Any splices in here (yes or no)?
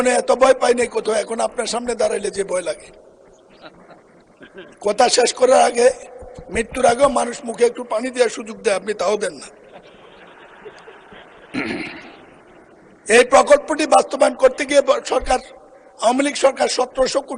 no